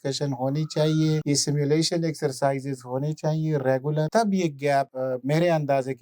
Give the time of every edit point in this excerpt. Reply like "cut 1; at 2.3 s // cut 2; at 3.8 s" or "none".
cut 1; at 1.2 s // cut 2; at 4.1 s // cut 3; at 4.9 s